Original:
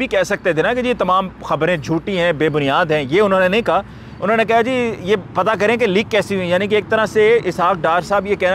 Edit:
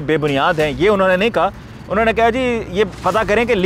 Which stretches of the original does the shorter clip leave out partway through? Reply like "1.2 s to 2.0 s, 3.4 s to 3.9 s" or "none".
none